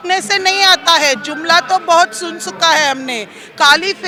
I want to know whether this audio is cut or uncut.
uncut